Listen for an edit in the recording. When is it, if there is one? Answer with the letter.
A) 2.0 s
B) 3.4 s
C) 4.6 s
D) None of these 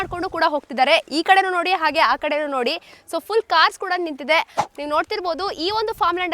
C